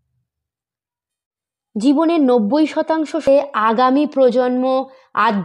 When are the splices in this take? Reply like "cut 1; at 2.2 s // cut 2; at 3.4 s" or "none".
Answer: cut 1; at 3.3 s

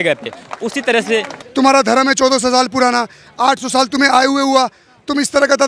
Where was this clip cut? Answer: cut 1; at 1.3 s

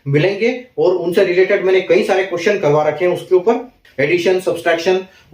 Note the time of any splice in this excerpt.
cut 1; at 3.8 s

